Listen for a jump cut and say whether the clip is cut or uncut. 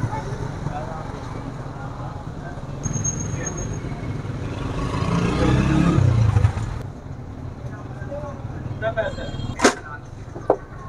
uncut